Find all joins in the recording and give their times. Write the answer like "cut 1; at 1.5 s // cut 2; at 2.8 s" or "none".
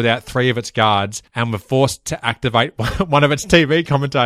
cut 1; at 1.2 s